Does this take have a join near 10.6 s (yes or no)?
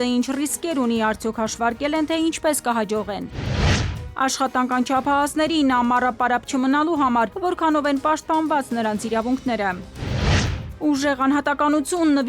yes